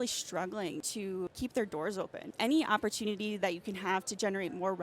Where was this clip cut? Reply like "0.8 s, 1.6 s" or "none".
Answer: 1.0 s, 2.2 s